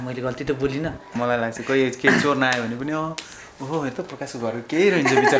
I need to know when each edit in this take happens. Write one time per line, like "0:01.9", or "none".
0:01.1